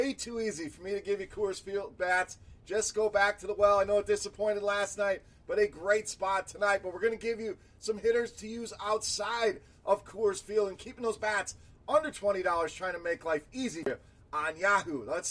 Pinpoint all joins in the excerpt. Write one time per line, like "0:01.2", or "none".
0:13.9